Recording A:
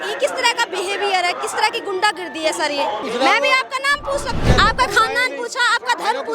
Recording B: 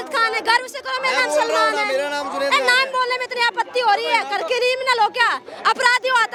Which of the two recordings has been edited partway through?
A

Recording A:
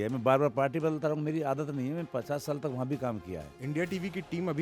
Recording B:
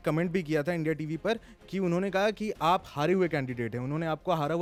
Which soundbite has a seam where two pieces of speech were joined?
A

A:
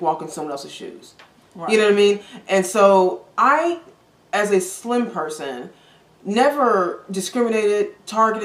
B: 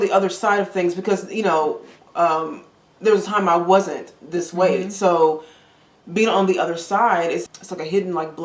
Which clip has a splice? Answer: B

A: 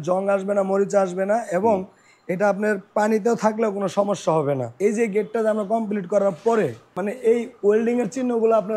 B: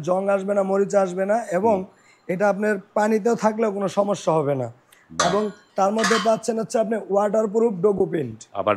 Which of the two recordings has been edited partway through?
A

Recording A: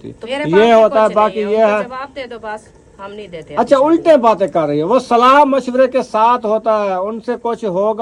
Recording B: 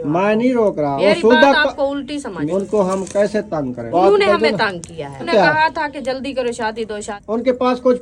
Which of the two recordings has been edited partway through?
B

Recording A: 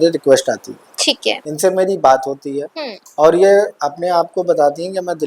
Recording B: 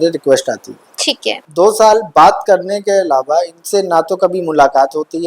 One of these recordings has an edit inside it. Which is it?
B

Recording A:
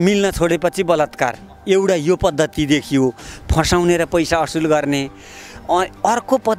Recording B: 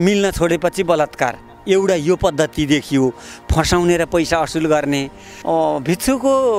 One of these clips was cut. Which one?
B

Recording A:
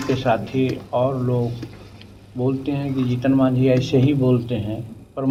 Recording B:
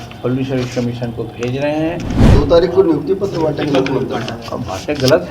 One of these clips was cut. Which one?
B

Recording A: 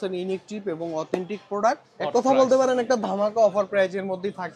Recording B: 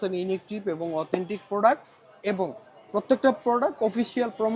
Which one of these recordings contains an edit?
A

